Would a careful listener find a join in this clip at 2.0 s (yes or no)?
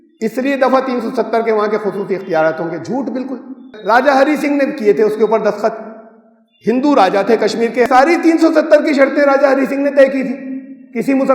no